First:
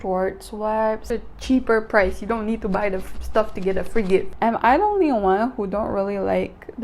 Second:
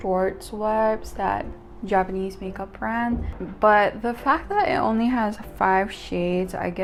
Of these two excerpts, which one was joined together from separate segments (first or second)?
first